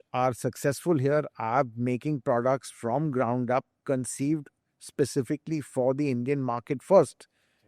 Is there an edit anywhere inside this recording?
no; 0 cuts

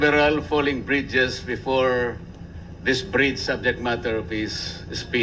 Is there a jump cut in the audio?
yes; 1 cut; at 4.2 s

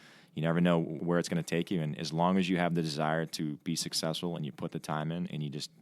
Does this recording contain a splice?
yes; 1 cut; at 1.0 s

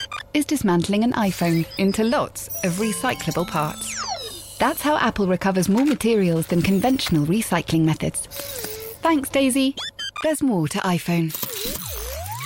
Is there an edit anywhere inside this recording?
no; 0 cuts

